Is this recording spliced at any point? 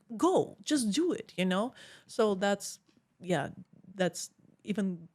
no; 0 cuts

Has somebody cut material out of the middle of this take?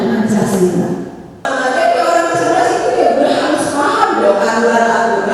yes; 1 cut; at 1.4 s

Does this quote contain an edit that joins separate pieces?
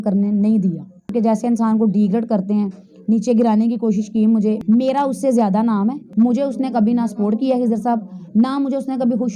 yes; 3 cuts; at 1.1 s, 4.6 s, 6.0 s

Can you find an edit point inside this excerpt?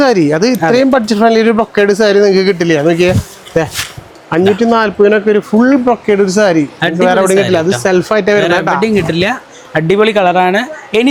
no; 0 cuts

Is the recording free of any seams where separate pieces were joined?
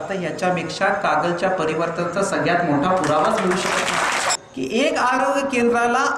no; 1 cut; at 4.4 s

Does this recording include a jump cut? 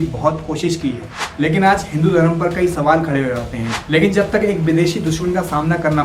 yes; 2 cuts; at 1.2 s, 3.7 s

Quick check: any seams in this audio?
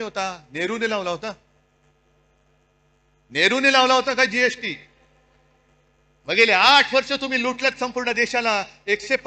no; 0 cuts

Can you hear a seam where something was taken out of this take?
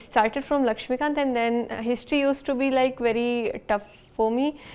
no; 0 cuts

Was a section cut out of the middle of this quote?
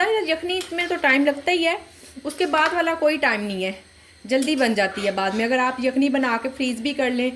no; 0 cuts

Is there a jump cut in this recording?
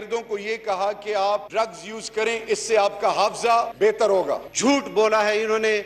yes; 3 cuts; at 1.5 s, 3.7 s, 4.5 s

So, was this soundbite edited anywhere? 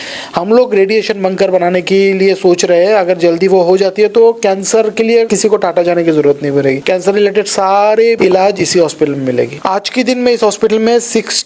yes; 4 cuts; at 5.3 s, 6.8 s, 8.2 s, 9.6 s

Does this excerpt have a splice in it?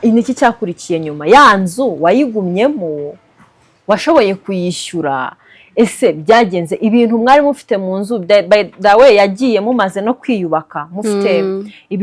no; 0 cuts

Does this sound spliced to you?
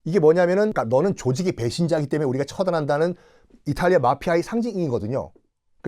no; 0 cuts

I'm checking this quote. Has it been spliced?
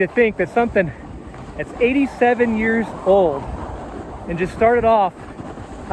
no; 0 cuts

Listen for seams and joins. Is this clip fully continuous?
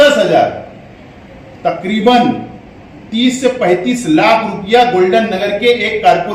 yes; 0 cuts

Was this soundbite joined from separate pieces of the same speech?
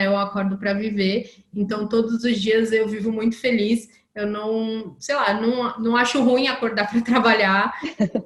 no; 0 cuts

